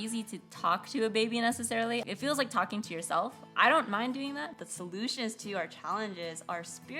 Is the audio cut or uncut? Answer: cut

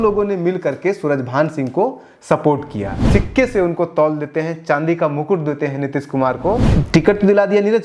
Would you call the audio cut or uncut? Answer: cut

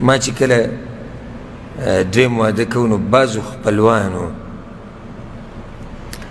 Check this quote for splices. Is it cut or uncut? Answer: uncut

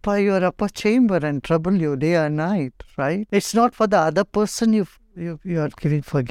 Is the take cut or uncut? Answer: cut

